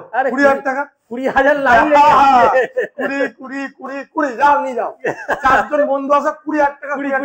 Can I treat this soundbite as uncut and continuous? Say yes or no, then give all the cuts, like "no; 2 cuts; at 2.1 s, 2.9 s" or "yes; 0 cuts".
yes; 0 cuts